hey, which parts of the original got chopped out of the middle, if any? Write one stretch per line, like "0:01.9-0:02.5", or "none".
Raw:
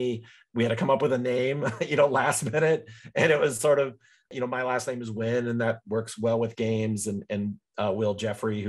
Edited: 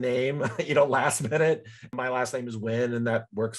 0:03.0-0:04.3